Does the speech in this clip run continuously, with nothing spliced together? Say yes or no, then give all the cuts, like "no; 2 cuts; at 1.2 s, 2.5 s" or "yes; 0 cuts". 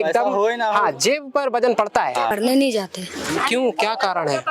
no; 1 cut; at 2.3 s